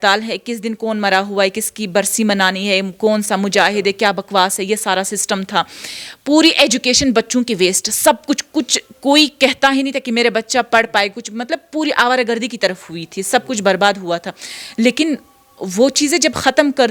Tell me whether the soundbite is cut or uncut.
uncut